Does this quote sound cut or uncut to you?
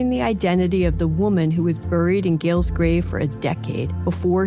uncut